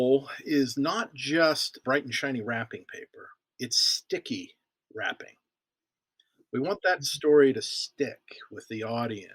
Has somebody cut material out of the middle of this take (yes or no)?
yes